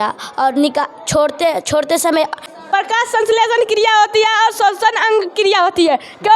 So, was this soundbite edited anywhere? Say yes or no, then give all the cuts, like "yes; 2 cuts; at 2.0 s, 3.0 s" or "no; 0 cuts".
yes; 1 cut; at 2.5 s